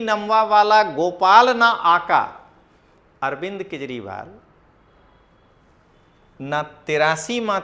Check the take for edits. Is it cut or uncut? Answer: uncut